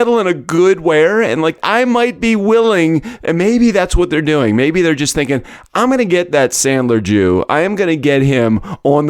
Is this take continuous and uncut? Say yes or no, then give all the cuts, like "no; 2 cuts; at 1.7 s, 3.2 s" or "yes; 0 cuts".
no; 1 cut; at 1.5 s